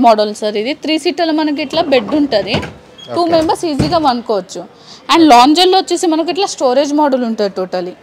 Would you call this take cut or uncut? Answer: uncut